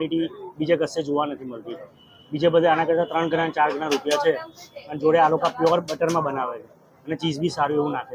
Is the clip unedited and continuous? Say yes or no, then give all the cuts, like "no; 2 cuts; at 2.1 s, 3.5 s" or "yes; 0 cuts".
yes; 0 cuts